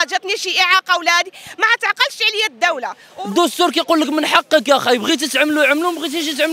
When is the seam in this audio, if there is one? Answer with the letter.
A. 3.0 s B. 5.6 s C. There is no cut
A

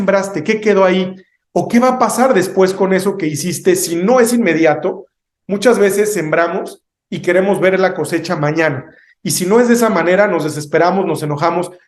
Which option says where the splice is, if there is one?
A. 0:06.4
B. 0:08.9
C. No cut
C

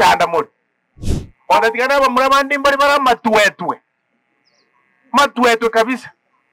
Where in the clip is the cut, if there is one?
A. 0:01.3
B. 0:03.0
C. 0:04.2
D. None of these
D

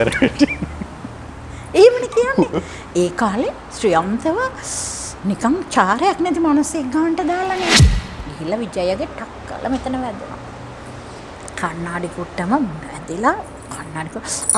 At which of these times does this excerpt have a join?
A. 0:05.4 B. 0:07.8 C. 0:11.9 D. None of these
B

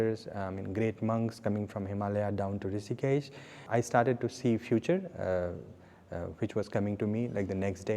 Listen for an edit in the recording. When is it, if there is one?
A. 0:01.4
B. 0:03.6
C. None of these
B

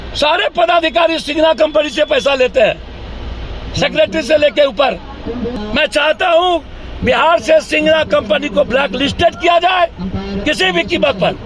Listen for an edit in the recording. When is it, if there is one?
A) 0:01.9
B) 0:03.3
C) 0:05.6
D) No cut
C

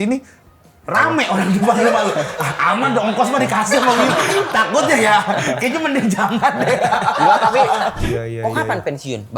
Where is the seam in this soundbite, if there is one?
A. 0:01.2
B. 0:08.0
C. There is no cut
B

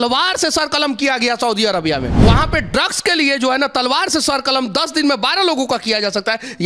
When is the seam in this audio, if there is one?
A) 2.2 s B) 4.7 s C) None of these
A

